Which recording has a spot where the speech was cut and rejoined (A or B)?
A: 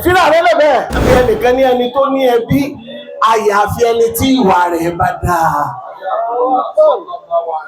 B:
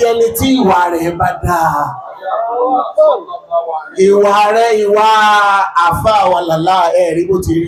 A